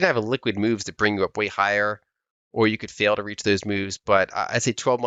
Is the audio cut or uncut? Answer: uncut